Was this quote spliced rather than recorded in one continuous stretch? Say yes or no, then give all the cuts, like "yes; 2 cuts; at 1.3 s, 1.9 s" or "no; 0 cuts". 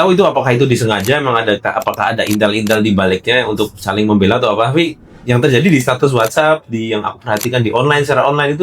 no; 0 cuts